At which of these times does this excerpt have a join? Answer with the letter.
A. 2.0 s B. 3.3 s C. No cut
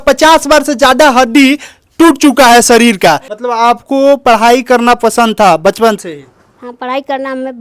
B